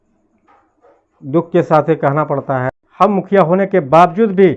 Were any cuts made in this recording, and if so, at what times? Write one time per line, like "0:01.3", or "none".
0:02.8